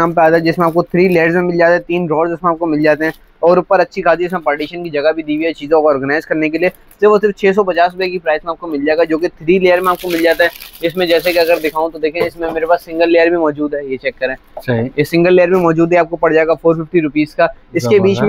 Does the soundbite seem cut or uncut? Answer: uncut